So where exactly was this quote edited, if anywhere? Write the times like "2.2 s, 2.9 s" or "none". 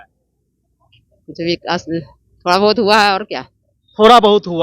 none